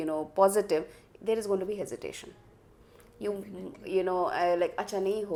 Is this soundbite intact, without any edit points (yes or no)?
yes